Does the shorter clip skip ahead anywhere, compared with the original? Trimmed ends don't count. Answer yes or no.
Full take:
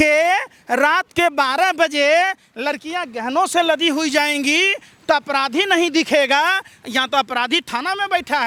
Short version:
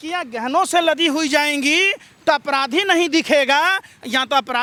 no